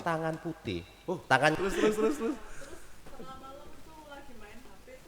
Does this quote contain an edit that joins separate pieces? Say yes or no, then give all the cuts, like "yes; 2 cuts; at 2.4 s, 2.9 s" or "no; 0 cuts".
yes; 1 cut; at 1.5 s